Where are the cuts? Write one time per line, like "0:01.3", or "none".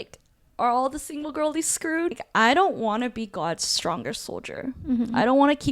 0:02.2